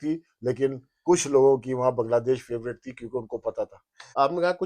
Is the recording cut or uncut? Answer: uncut